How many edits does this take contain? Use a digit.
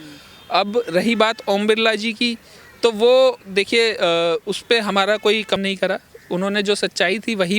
1